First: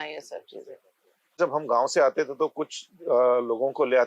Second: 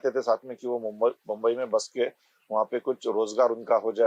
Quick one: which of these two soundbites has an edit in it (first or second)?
first